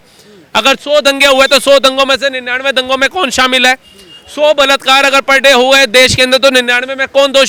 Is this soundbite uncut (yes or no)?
yes